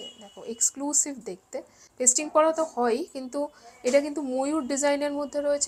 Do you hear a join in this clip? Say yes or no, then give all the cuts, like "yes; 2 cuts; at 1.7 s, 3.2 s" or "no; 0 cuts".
no; 0 cuts